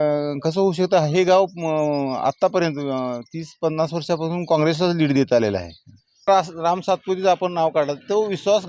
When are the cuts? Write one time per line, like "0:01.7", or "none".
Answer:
0:06.3